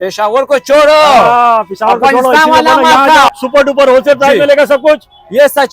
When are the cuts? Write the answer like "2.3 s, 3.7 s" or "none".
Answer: 3.3 s